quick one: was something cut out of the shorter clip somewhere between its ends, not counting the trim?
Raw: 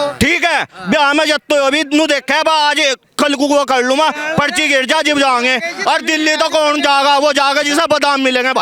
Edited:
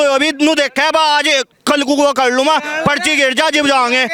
no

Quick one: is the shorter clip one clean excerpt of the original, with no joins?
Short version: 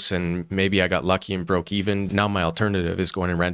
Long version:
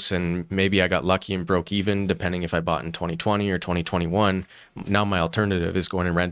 no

